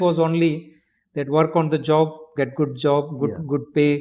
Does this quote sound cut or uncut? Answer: uncut